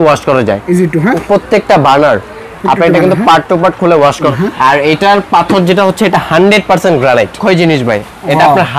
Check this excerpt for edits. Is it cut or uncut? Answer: cut